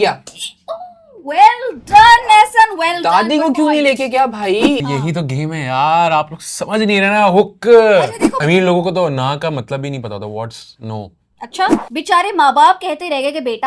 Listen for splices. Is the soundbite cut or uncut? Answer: cut